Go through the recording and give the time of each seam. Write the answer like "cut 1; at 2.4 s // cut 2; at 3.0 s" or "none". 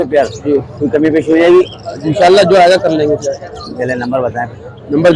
none

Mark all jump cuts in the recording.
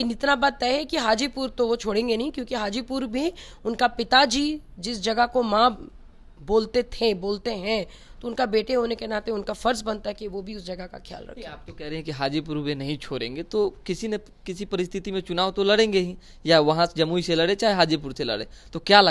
none

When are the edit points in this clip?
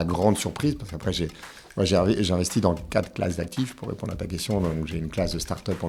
none

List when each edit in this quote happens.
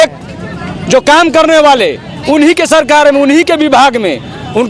none

